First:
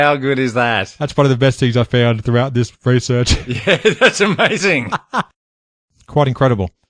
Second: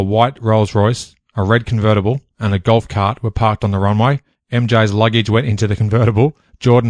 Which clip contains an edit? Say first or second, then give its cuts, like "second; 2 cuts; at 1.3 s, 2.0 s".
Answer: first; 1 cut; at 5.7 s